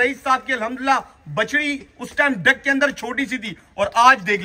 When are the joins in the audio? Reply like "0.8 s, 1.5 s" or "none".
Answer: none